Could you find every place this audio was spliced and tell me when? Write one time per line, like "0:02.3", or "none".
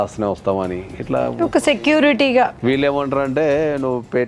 0:02.6